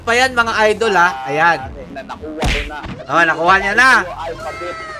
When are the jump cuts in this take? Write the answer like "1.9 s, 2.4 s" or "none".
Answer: 1.8 s

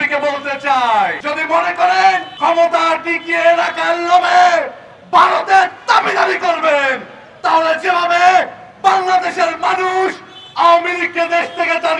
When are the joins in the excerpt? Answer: 1.2 s, 2.3 s

